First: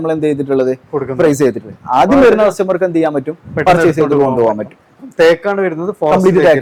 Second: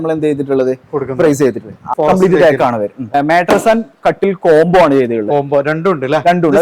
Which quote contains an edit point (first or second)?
second